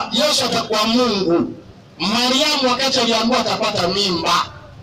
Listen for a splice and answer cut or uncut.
uncut